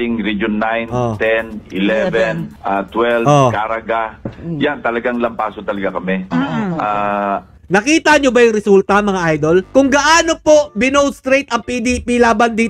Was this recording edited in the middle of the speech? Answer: no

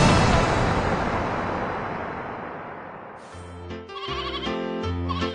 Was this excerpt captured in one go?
no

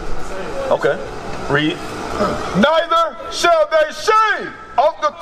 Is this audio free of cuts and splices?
no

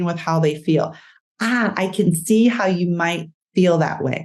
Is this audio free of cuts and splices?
yes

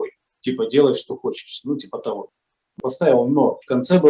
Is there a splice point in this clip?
yes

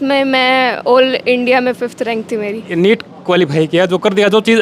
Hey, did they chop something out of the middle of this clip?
yes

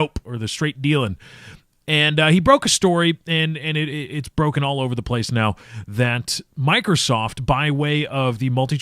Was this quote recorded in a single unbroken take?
no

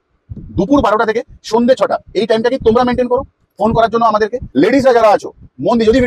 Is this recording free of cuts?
no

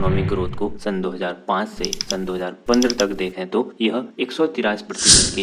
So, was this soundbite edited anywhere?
no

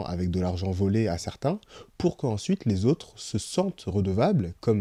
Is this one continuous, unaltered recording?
yes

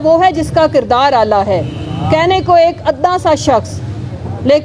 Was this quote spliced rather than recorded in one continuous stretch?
no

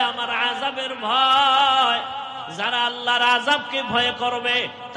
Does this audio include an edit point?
yes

